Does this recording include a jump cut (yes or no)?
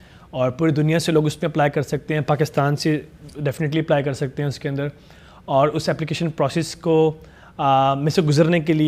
no